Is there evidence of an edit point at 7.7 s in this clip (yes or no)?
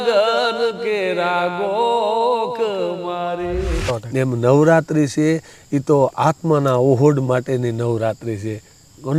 no